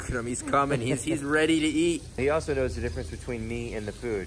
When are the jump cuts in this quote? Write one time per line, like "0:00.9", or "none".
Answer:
0:02.2